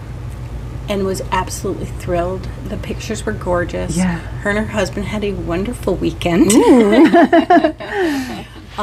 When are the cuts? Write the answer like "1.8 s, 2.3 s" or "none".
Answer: none